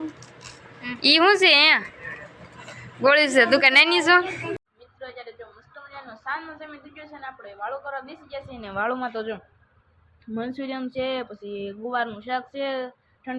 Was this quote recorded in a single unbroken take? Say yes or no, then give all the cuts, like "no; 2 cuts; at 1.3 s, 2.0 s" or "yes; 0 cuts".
no; 1 cut; at 4.6 s